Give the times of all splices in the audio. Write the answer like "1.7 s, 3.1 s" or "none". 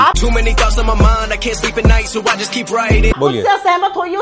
none